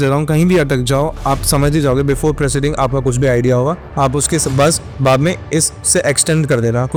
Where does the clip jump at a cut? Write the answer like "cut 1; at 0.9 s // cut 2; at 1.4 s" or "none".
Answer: none